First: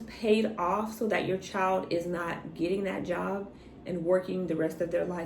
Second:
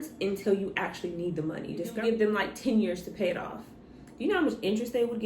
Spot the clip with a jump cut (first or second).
second